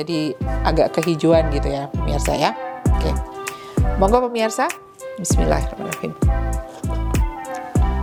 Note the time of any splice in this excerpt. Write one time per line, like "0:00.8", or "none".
none